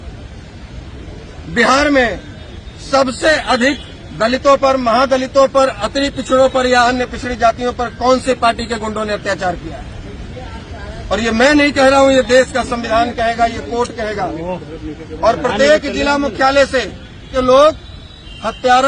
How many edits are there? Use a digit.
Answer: 1